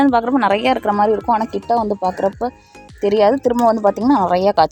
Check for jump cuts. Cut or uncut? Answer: uncut